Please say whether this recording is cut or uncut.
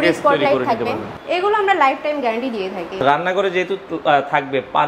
cut